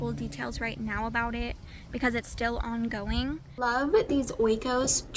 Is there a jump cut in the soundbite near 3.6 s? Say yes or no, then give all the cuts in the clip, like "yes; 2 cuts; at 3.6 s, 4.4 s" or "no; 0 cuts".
yes; 1 cut; at 3.6 s